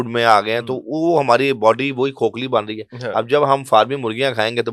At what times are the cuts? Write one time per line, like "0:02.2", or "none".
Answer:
none